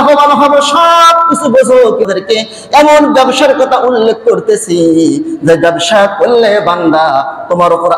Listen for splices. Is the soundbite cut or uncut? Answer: cut